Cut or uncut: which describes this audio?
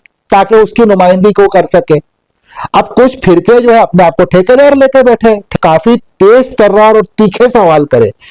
cut